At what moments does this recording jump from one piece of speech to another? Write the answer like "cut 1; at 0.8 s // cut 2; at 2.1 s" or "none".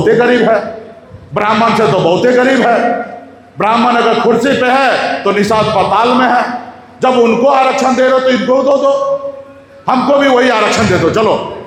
none